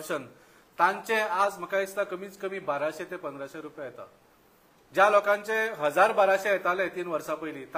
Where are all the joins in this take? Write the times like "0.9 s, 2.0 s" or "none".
none